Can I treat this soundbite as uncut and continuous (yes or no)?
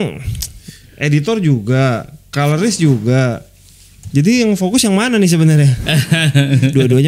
yes